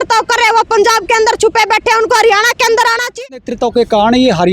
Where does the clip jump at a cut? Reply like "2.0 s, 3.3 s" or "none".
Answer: 3.3 s